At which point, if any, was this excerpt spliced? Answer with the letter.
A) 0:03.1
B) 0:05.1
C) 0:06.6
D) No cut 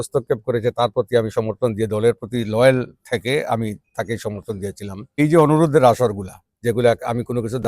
B